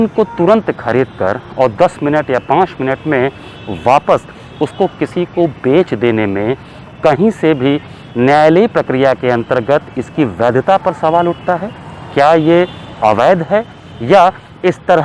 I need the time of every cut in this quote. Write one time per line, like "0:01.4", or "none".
none

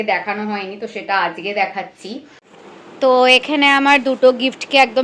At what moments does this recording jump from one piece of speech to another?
0:02.5

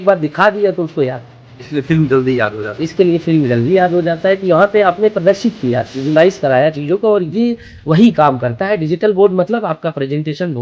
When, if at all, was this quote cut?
none

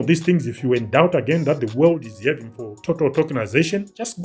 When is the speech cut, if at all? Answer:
none

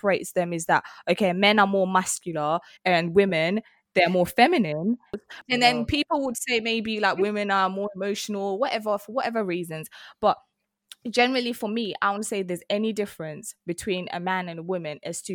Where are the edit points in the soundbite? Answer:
0:02.7
0:05.2

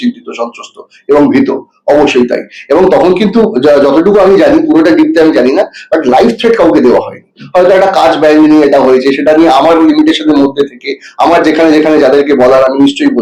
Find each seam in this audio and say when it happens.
none

